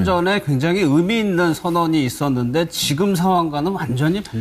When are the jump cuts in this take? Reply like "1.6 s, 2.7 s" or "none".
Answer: 2.9 s

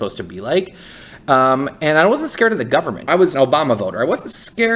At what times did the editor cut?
3.3 s

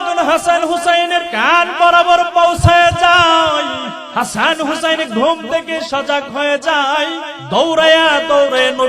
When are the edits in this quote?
1.3 s, 4.0 s, 7.3 s

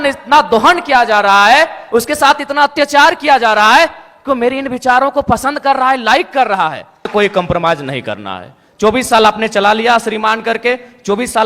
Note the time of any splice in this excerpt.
7.1 s

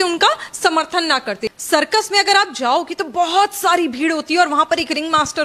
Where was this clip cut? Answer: 1.5 s

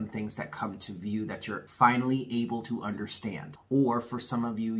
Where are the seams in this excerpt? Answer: 1.7 s, 3.5 s

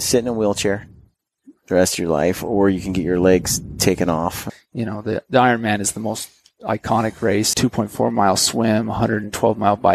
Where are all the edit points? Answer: 4.5 s, 7.5 s

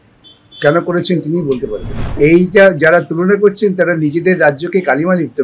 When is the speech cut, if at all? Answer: 2.0 s

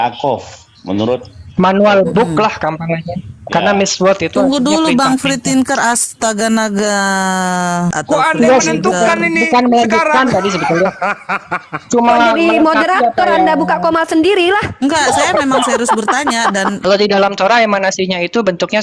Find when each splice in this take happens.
8.0 s, 16.8 s

